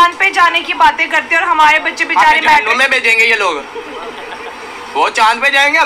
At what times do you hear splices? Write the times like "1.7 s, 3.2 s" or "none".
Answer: none

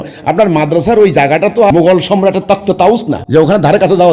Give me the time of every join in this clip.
1.7 s, 3.2 s

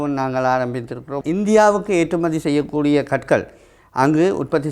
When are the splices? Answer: 1.2 s

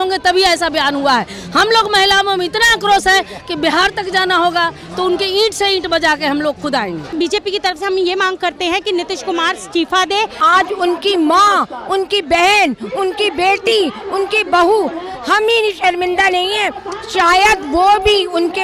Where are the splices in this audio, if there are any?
7.1 s, 10.4 s

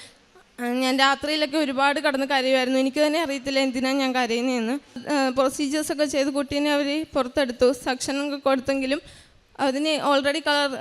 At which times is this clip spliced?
5.0 s

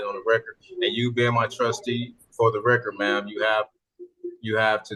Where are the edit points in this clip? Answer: none

